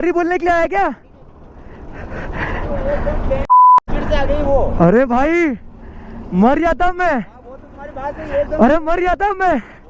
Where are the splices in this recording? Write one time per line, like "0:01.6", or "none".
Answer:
none